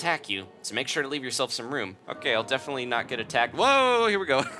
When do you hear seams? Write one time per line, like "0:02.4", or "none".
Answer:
none